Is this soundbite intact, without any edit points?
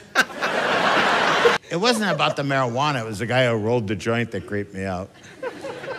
no; 1 cut; at 1.6 s

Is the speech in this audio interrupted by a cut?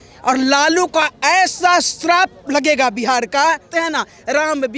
yes; 1 cut; at 3.7 s

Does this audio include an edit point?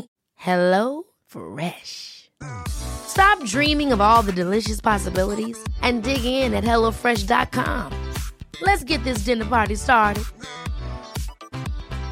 no; 0 cuts

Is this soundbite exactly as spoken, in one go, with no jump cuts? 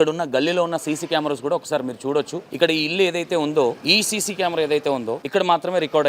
no; 3 cuts; at 2.4 s, 3.8 s, 5.2 s

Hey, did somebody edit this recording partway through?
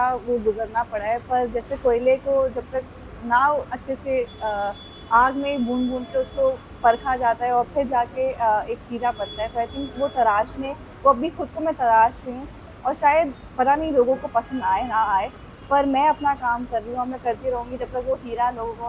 no; 0 cuts

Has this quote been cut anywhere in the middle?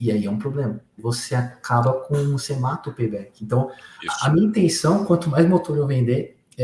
yes; 1 cut; at 0.9 s

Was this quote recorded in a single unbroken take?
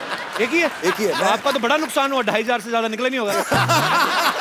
yes; 0 cuts

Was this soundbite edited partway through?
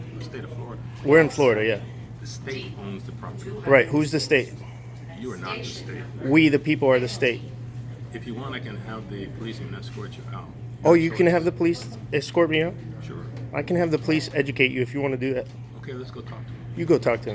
no; 0 cuts

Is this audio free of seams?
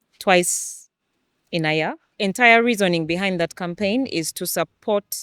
no; 1 cut; at 2.0 s

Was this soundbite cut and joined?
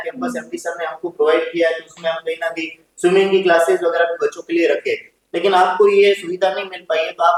no; 0 cuts

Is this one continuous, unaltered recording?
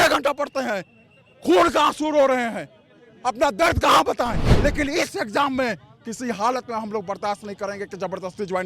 no; 1 cut; at 4.5 s

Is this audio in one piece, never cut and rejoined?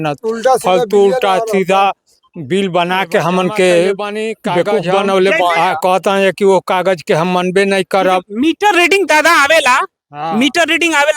no; 1 cut; at 5.6 s

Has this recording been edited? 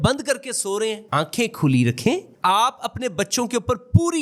no; 0 cuts

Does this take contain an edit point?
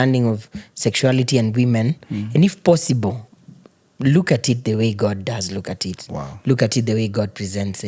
no; 0 cuts

